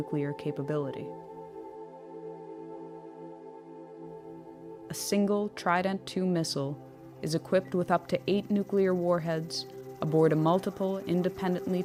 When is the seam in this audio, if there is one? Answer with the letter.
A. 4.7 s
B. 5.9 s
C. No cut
C